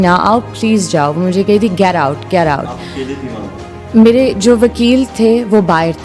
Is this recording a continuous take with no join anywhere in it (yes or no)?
yes